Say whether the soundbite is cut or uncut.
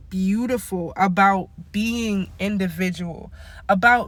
uncut